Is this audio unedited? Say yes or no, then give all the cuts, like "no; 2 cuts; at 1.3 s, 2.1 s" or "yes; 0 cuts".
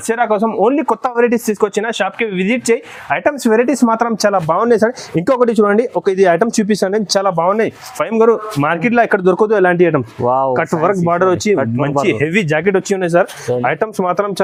yes; 0 cuts